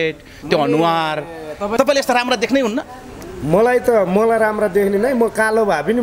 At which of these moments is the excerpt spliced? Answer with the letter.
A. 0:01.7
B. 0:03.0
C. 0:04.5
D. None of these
A